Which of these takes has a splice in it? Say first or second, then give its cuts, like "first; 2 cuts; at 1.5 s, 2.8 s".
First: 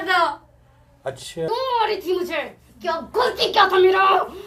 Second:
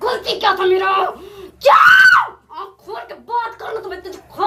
first; 1 cut; at 1.5 s